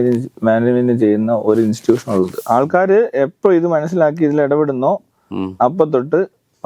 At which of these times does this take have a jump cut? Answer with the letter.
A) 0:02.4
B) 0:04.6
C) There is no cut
A